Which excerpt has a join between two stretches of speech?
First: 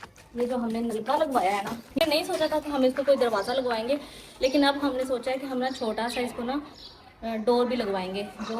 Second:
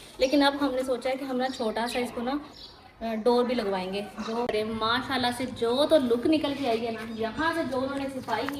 first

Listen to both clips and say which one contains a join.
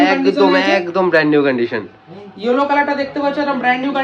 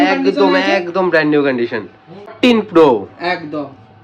second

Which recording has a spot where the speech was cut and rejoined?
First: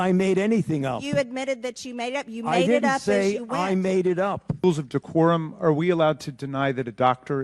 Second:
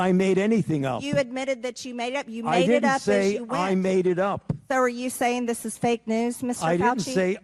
first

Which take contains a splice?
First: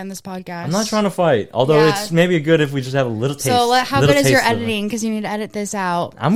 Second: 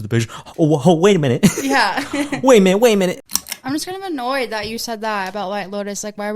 second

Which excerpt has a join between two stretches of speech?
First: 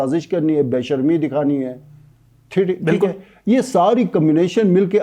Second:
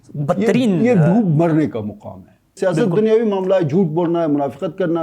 second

